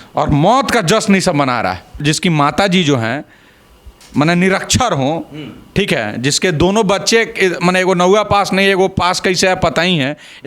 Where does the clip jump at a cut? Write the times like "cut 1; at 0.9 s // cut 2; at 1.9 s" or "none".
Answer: cut 1; at 2.0 s